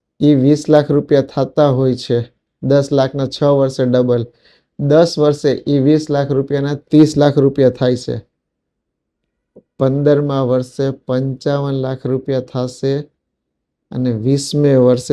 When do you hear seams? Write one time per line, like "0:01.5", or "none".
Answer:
none